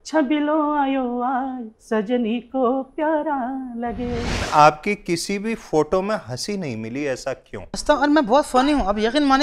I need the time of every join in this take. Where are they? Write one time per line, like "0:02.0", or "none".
0:04.5
0:07.8